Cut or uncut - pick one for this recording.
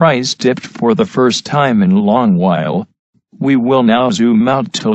uncut